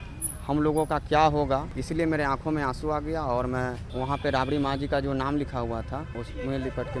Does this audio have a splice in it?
yes; 3 cuts; at 1.7 s, 3.8 s, 6.1 s

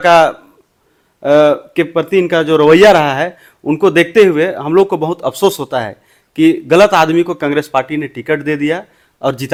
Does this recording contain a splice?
no; 0 cuts

